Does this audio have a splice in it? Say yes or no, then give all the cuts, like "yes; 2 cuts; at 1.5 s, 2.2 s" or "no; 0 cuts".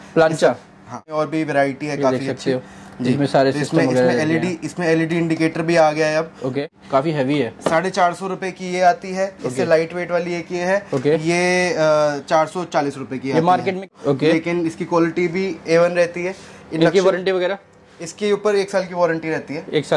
yes; 3 cuts; at 1.1 s, 6.7 s, 13.9 s